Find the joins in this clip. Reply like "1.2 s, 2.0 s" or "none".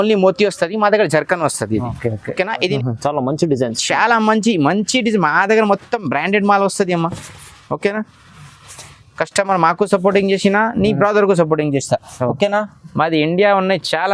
2.7 s